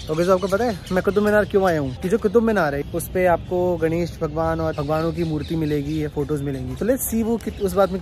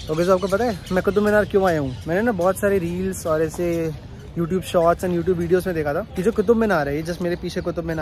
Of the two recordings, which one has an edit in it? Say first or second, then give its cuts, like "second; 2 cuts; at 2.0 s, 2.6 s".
first; 4 cuts; at 2.0 s, 2.8 s, 4.7 s, 6.7 s